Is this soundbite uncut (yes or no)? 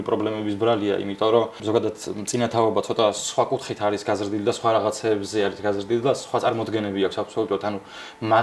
no